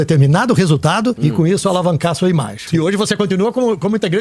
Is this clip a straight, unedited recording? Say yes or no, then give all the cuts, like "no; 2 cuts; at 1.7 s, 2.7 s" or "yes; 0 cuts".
no; 2 cuts; at 1.2 s, 2.6 s